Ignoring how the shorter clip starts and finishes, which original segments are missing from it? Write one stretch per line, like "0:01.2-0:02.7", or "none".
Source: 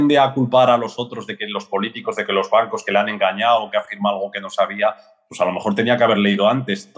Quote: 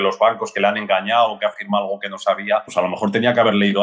0:05.0-0:05.3